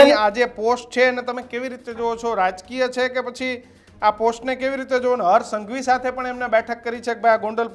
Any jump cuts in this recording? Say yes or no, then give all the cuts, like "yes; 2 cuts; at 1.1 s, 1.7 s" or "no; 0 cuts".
no; 0 cuts